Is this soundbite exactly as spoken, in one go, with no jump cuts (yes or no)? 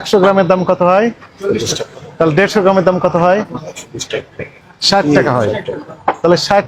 yes